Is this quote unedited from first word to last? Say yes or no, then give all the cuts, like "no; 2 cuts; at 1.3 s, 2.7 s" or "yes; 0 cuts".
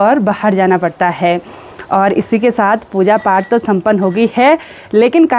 yes; 0 cuts